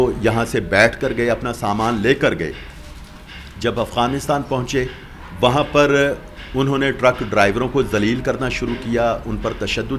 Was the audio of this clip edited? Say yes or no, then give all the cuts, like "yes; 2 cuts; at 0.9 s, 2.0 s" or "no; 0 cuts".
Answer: no; 0 cuts